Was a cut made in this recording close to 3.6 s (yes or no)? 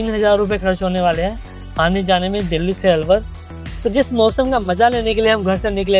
yes